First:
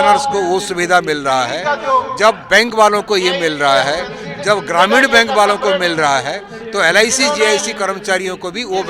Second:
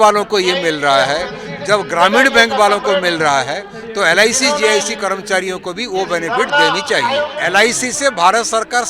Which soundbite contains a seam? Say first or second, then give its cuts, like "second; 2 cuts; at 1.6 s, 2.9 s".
second; 1 cut; at 7.4 s